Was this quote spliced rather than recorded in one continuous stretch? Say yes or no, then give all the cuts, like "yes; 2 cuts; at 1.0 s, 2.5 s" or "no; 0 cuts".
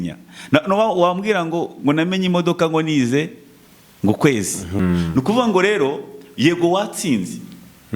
yes; 1 cut; at 4.8 s